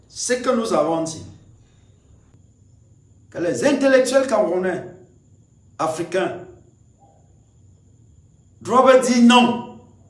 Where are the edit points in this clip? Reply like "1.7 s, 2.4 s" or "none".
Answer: 2.3 s